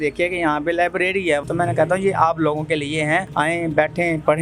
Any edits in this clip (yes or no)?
yes